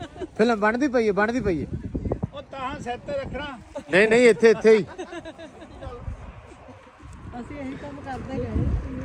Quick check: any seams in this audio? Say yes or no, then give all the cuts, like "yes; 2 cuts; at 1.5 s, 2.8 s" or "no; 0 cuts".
no; 0 cuts